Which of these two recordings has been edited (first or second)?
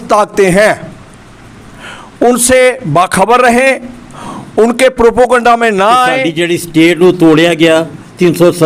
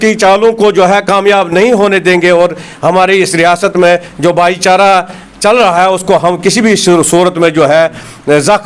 first